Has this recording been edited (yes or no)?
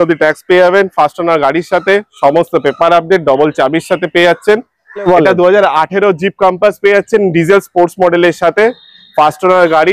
yes